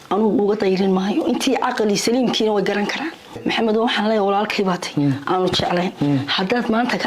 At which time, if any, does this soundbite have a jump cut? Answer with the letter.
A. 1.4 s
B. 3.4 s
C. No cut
B